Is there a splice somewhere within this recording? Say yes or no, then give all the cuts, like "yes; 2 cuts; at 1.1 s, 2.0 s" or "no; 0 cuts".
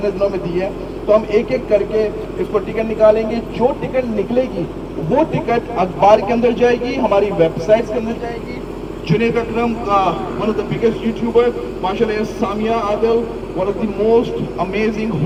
no; 0 cuts